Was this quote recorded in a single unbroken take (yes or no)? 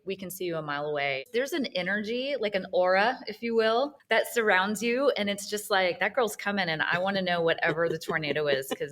no